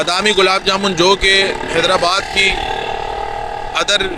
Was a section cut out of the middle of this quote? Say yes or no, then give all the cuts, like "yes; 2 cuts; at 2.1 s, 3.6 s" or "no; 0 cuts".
no; 0 cuts